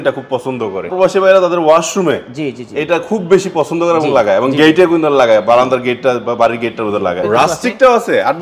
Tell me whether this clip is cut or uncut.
cut